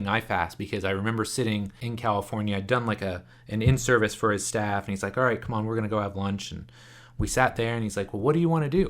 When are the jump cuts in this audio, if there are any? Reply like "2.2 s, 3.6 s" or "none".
1.8 s